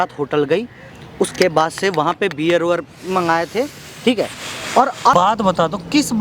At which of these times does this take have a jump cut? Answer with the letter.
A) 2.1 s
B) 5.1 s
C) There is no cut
B